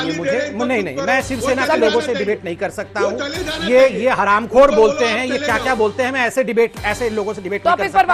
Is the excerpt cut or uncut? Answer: uncut